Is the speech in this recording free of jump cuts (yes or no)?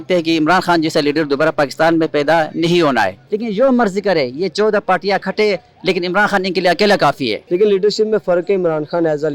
no